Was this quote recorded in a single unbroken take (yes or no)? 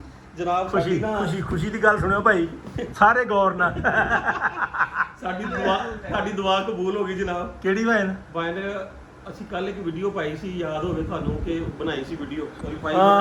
yes